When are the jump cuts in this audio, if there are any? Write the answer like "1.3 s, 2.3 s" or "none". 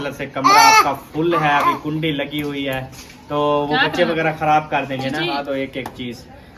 5.3 s